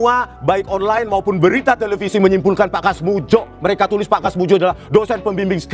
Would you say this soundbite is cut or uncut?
uncut